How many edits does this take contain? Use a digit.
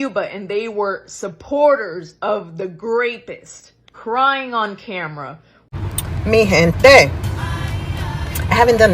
1